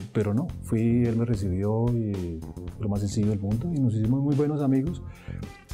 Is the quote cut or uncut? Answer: uncut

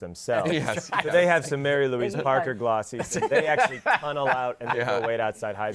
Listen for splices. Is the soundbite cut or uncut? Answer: uncut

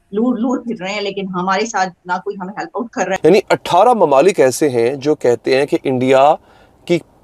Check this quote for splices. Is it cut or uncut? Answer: cut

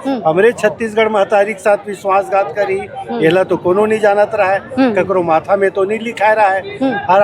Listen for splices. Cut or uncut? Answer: uncut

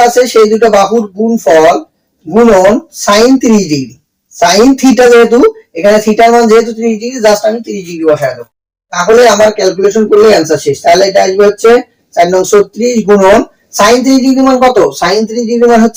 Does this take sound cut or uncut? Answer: uncut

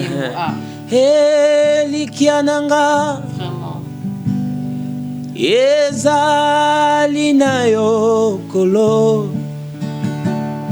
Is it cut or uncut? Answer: uncut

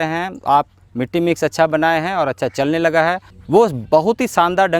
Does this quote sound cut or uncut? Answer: cut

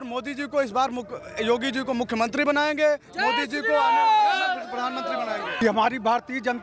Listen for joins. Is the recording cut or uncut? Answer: cut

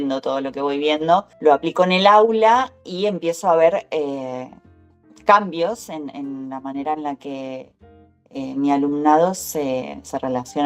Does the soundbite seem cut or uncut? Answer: uncut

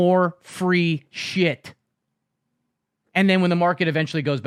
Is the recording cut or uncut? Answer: uncut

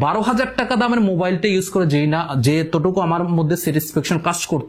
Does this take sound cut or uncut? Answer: uncut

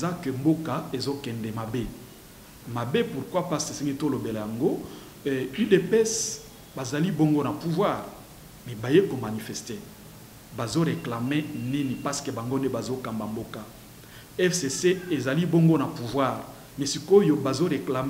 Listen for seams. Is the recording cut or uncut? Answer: uncut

